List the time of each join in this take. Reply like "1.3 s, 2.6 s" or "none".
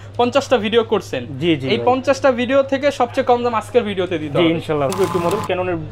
4.9 s